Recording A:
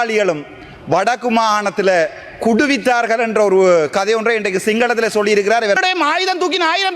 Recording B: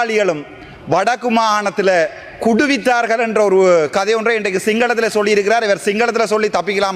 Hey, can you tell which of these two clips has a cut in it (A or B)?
A